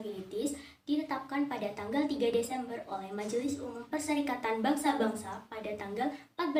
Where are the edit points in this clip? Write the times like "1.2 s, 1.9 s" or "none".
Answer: none